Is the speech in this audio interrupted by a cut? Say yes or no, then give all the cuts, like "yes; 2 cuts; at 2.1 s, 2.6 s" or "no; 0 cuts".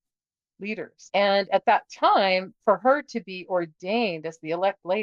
yes; 1 cut; at 0.9 s